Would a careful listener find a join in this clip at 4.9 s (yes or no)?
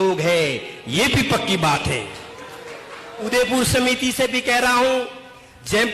no